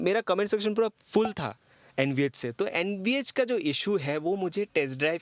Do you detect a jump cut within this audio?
no; 0 cuts

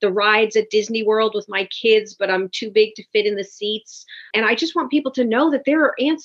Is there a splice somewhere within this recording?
yes; 1 cut; at 4.3 s

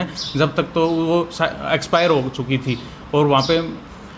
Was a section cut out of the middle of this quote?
no; 0 cuts

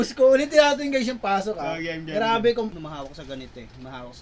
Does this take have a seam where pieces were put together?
yes; 1 cut; at 2.8 s

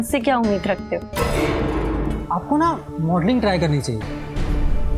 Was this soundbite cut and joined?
yes; 1 cut; at 2.2 s

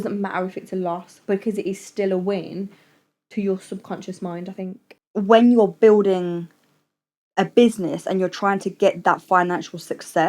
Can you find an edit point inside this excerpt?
yes; 1 cut; at 4.9 s

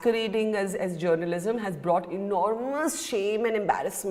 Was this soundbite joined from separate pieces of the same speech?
no; 0 cuts

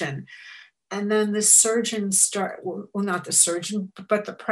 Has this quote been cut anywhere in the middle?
no; 0 cuts

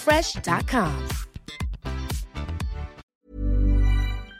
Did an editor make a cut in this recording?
yes; 1 cut; at 3.1 s

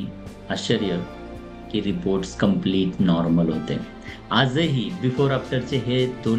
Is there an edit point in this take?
no; 0 cuts

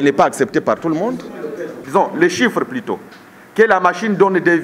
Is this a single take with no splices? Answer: no; 1 cut; at 1.7 s

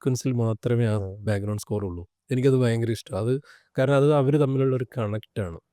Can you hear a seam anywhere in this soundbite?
no; 0 cuts

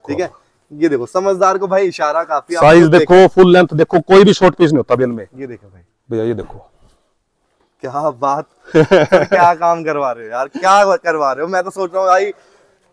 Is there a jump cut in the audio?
no; 0 cuts

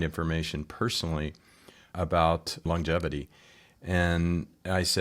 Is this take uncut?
no; 2 cuts; at 1.9 s, 2.7 s

